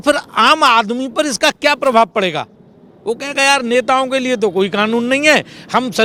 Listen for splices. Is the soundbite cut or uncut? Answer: uncut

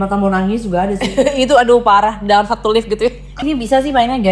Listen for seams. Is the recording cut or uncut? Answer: cut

